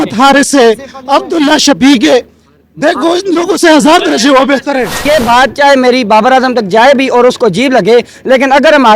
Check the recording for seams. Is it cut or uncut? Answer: cut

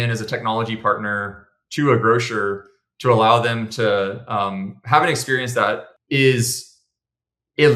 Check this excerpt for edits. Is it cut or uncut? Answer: cut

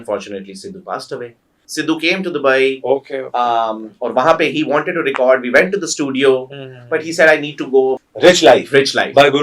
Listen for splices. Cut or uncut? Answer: cut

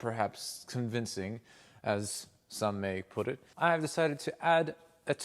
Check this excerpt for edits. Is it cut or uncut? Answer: cut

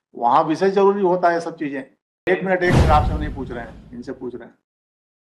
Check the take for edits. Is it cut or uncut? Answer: cut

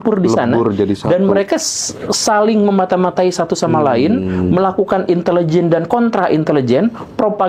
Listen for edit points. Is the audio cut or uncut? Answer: uncut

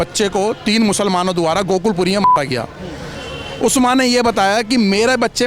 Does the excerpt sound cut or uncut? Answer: uncut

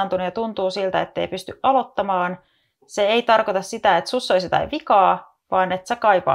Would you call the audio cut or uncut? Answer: uncut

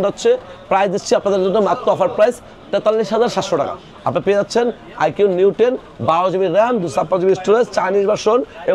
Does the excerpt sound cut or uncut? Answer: uncut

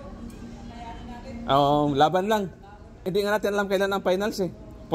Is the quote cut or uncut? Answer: cut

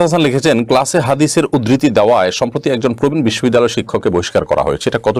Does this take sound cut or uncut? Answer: uncut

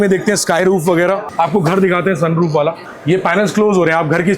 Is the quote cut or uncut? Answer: cut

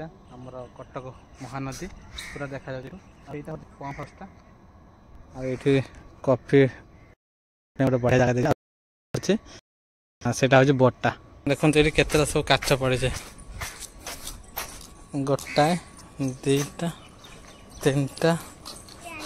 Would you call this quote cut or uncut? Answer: uncut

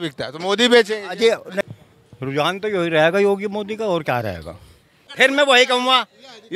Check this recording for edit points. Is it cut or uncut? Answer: cut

